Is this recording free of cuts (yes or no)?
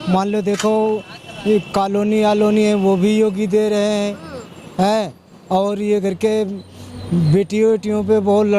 yes